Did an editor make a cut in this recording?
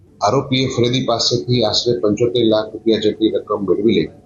no; 0 cuts

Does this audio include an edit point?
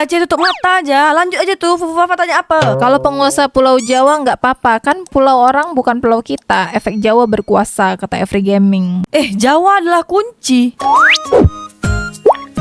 yes; 2 cuts; at 2.8 s, 10.8 s

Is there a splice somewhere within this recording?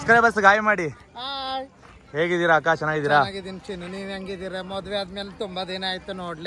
no; 0 cuts

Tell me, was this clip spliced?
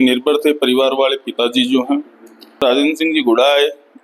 yes; 1 cut; at 2.6 s

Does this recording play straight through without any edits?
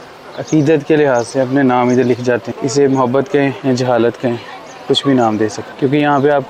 no; 3 cuts; at 2.5 s, 3.6 s, 5.6 s

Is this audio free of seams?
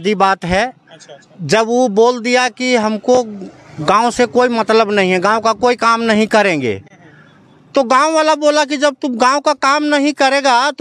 yes; 0 cuts

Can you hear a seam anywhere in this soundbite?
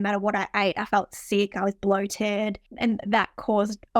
yes; 1 cut; at 2.6 s

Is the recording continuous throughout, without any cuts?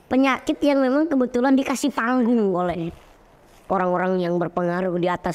yes; 0 cuts

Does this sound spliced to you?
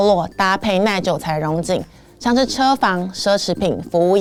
no; 0 cuts

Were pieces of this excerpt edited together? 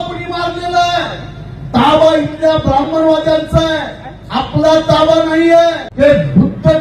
yes; 1 cut; at 5.9 s

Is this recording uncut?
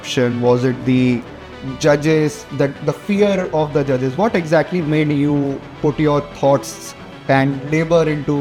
yes; 0 cuts

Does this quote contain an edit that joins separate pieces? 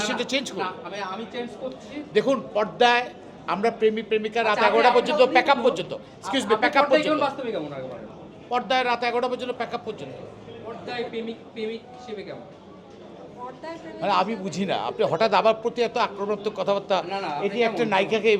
yes; 1 cut; at 10.9 s

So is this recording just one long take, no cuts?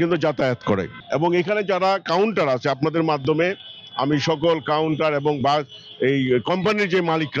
yes; 0 cuts

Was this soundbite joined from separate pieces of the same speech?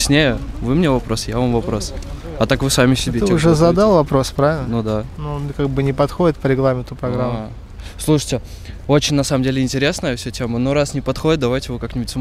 no; 0 cuts

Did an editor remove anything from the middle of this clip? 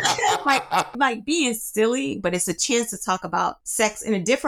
yes; 3 cuts; at 0.9 s, 2.2 s, 3.6 s

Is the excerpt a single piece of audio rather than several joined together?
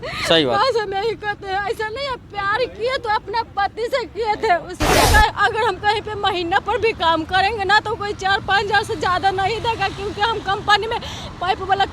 no; 1 cut; at 5.0 s

